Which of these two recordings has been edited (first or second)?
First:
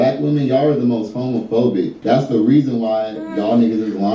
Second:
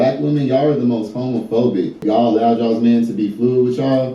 second